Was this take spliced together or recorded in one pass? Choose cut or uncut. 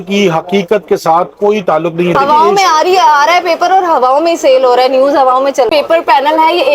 cut